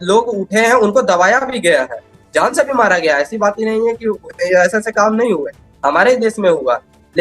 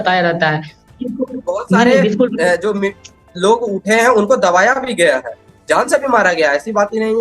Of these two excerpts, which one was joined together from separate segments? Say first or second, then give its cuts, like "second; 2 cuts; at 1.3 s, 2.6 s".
second; 1 cut; at 0.9 s